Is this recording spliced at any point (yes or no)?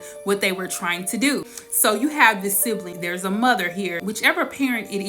yes